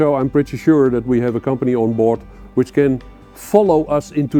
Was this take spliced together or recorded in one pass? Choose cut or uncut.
uncut